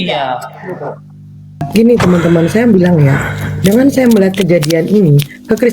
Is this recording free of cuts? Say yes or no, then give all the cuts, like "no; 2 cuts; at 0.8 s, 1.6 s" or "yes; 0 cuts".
no; 1 cut; at 1.7 s